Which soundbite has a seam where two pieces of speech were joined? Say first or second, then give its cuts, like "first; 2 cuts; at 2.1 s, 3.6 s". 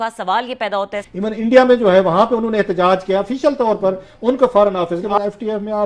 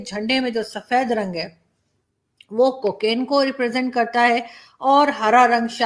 first; 2 cuts; at 1.0 s, 5.1 s